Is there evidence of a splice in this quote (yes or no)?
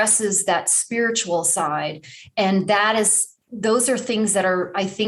no